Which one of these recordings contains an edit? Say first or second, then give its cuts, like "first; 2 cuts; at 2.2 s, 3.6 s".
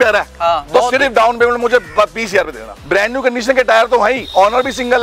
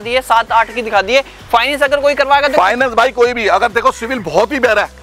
first; 1 cut; at 2.6 s